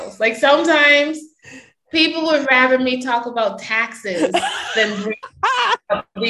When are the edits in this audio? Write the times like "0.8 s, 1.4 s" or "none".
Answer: 5.3 s